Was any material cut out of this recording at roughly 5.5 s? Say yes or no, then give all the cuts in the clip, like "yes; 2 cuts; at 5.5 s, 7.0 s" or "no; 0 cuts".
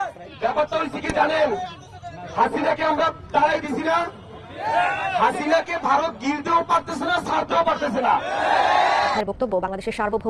no; 1 cut; at 9.2 s